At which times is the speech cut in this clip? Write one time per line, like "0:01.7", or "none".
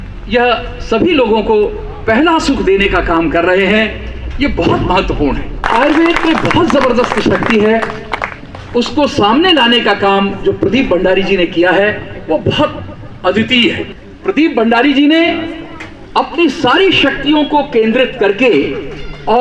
0:05.6
0:13.9